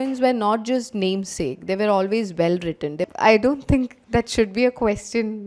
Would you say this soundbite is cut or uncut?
cut